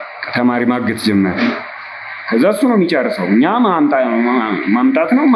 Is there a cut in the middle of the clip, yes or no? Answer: no